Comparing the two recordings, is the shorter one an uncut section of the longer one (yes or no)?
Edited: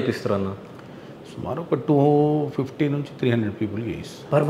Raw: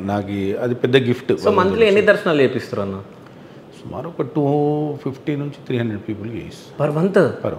yes